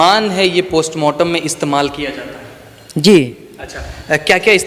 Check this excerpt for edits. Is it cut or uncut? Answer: uncut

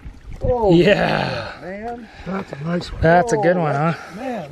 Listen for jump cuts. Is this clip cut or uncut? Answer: uncut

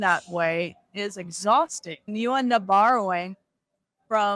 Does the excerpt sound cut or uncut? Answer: cut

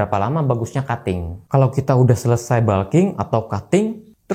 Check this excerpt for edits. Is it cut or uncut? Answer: cut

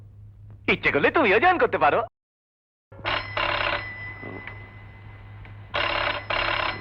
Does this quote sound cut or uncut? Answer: uncut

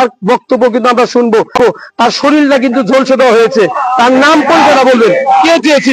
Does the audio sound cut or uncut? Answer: uncut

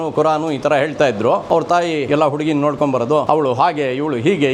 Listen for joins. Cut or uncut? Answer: cut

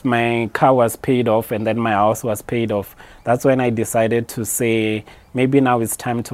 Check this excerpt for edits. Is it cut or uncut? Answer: uncut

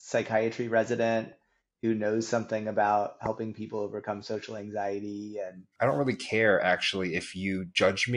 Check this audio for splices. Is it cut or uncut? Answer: cut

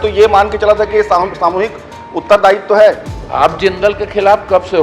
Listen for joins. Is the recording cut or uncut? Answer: cut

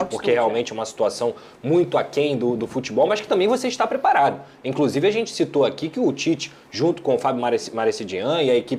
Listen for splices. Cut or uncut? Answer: uncut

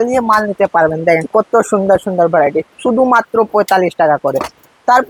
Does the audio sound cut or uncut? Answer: uncut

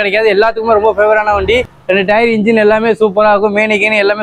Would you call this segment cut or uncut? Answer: cut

